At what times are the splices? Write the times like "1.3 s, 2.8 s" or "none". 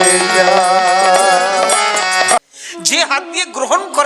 2.4 s